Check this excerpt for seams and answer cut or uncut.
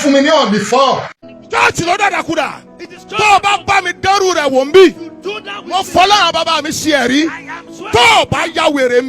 cut